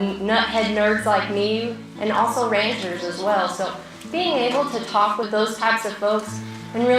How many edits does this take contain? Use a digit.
2